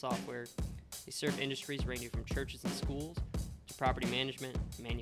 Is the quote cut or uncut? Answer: uncut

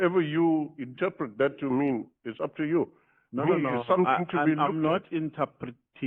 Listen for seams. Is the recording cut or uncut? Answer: uncut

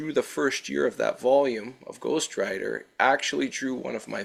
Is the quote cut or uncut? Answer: uncut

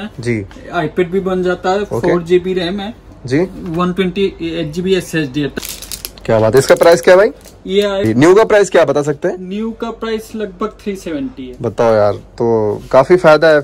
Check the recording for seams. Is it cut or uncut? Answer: cut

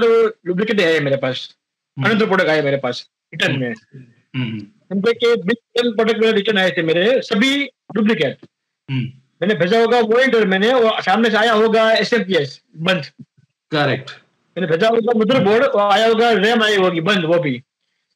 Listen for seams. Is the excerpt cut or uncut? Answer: uncut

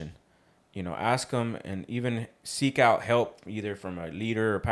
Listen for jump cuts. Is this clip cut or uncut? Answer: uncut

